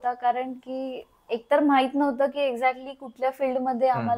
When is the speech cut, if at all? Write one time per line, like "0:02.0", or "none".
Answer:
none